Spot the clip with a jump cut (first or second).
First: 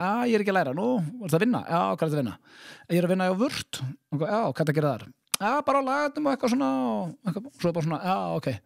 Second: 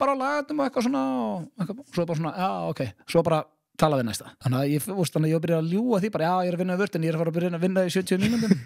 second